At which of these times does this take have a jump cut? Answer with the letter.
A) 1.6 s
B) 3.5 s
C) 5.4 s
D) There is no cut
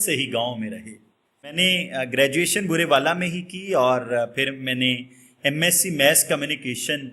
A